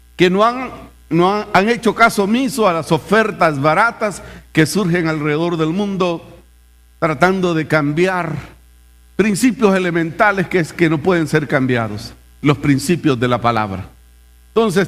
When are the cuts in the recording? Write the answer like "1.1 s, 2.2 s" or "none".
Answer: 4.2 s